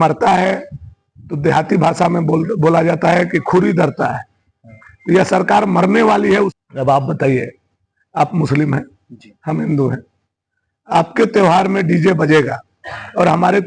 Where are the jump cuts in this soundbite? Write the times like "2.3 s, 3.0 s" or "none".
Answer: 6.5 s